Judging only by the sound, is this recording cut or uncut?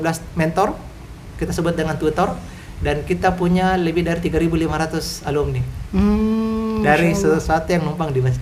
uncut